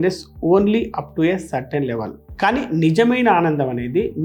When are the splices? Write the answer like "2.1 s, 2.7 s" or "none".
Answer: 2.2 s

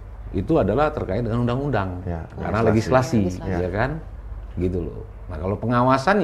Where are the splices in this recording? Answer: none

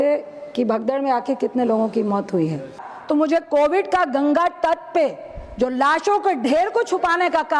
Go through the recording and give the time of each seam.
2.9 s

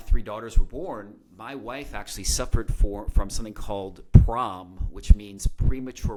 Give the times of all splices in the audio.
none

